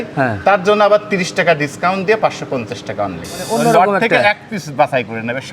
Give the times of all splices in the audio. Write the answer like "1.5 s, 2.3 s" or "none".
3.3 s